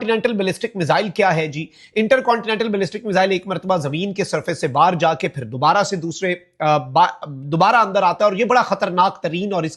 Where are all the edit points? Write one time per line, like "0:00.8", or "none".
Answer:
none